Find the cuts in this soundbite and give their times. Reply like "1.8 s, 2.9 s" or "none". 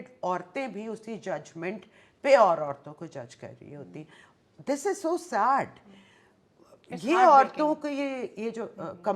none